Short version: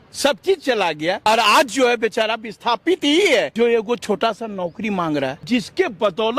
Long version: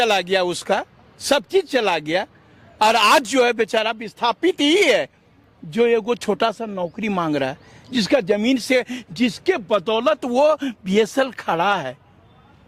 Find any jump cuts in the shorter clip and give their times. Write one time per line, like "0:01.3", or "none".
0:01.2
0:03.5
0:05.4